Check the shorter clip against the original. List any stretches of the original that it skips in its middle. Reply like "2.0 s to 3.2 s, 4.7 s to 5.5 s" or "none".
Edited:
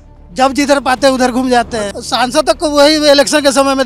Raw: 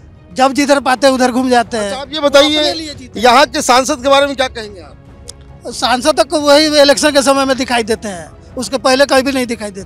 2.0 s to 5.7 s